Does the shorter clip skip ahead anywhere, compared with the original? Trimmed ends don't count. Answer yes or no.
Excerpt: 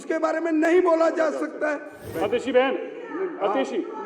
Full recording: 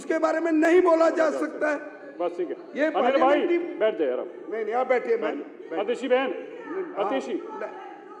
yes